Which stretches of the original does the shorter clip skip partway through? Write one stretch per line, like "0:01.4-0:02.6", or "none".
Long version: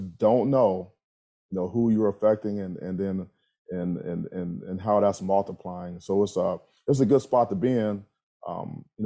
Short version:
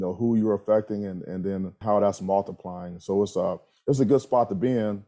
0:03.3-0:04.8